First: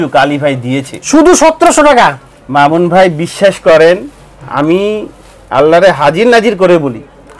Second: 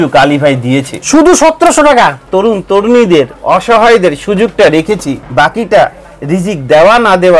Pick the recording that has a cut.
second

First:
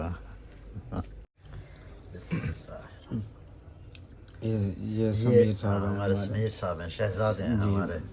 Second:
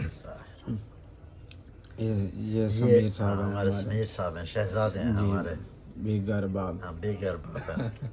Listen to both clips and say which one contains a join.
first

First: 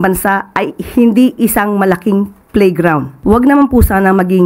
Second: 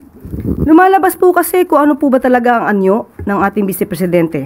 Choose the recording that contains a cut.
first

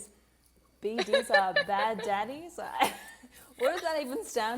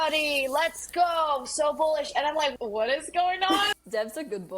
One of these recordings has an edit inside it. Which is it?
second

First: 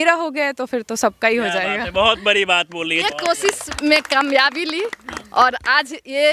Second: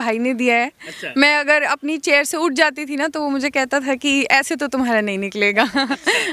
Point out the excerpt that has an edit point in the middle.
first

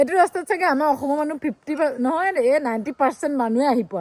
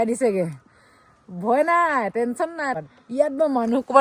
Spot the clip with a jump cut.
second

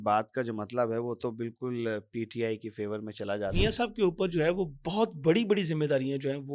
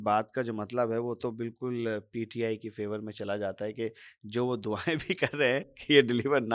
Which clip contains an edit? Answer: first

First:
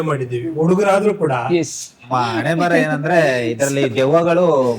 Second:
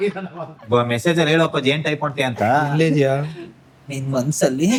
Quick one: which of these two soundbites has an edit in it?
first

